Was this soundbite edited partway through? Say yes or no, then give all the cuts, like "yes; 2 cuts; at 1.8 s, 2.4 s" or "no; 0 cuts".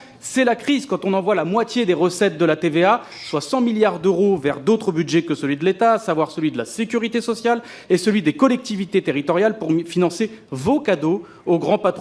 no; 0 cuts